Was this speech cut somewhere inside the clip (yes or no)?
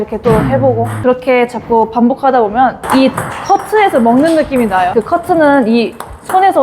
yes